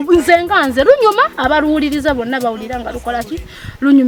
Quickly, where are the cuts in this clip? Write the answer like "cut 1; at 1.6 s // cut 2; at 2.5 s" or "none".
none